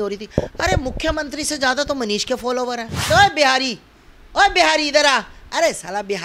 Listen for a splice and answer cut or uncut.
cut